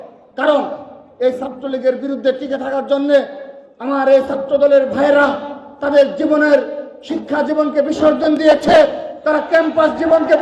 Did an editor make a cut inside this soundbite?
no; 0 cuts

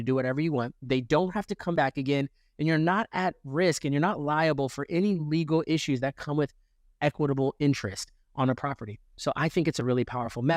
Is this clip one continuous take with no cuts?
yes; 0 cuts

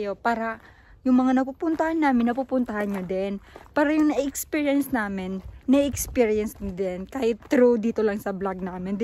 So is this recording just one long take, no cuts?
yes; 0 cuts

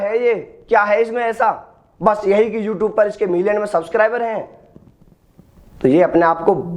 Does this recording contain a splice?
no; 0 cuts

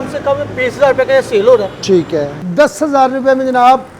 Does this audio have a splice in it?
yes; 1 cut; at 2.4 s

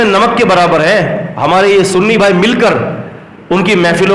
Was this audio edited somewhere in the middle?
no; 0 cuts

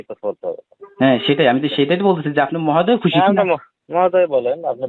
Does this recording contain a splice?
no; 0 cuts

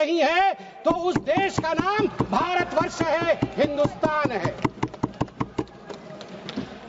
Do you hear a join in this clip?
no; 0 cuts

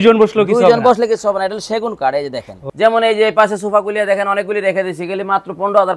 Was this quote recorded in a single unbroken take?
no; 1 cut; at 2.6 s

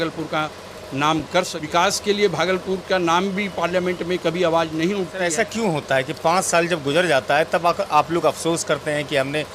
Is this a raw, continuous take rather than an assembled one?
no; 2 cuts; at 1.6 s, 5.3 s

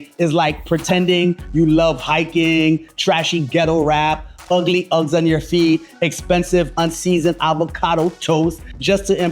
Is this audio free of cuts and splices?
yes; 0 cuts

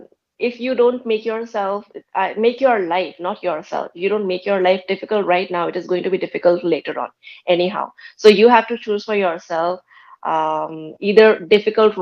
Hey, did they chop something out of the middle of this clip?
no; 0 cuts

